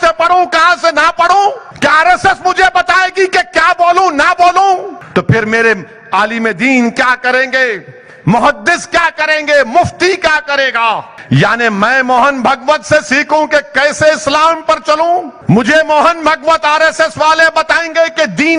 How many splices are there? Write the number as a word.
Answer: four